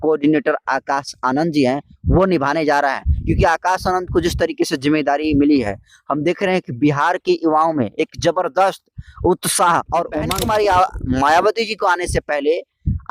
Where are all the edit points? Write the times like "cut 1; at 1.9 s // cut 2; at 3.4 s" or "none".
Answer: cut 1; at 10.3 s